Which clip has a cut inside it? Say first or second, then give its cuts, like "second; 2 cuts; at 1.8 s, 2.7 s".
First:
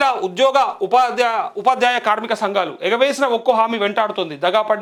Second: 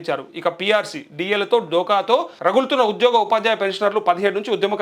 second; 1 cut; at 2.3 s